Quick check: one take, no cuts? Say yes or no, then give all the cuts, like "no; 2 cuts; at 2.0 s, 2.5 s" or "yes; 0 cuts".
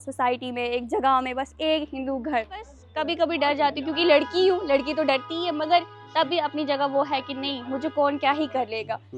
no; 1 cut; at 2.8 s